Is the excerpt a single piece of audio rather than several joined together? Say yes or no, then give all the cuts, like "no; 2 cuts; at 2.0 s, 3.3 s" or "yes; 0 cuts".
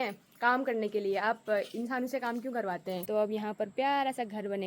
no; 1 cut; at 3.0 s